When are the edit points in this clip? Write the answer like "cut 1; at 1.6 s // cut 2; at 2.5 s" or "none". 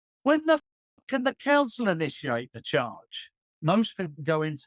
cut 1; at 3.5 s